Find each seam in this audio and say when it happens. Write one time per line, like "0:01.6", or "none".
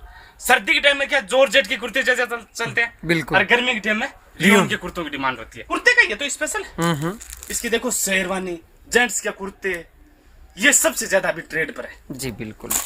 0:05.7